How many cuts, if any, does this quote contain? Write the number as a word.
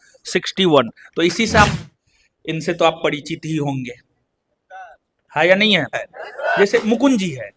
two